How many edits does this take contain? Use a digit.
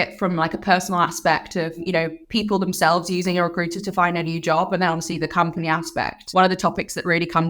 2